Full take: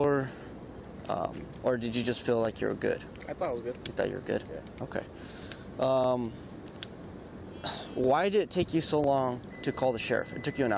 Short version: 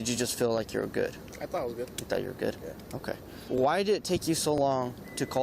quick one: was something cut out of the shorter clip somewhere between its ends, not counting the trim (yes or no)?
yes